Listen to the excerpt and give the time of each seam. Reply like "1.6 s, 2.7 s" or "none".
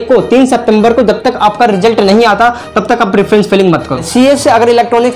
4.0 s